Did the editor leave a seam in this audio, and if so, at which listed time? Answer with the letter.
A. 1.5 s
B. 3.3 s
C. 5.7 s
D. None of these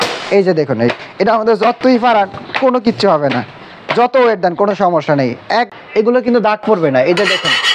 C